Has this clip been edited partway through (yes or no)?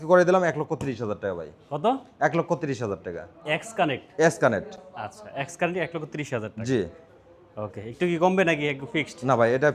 no